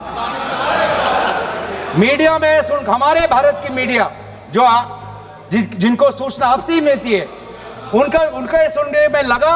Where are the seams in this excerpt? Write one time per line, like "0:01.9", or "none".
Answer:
none

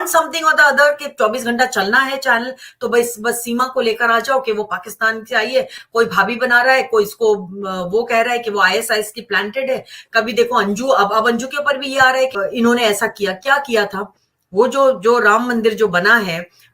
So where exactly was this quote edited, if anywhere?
0:12.4

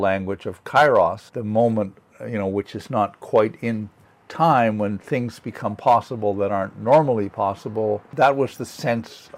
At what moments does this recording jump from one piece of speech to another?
0:01.3
0:08.1

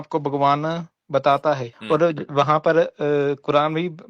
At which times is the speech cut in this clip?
0:01.7

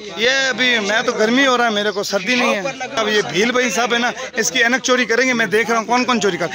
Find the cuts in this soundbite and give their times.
0:03.0

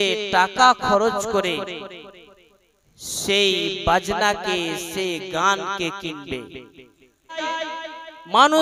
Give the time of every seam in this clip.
0:07.4

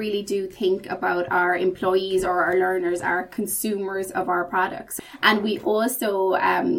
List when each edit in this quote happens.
0:05.0

